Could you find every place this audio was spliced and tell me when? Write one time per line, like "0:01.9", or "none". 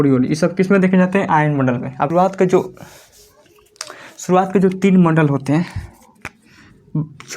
0:02.1